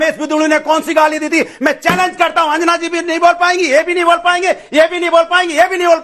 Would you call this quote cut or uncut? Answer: uncut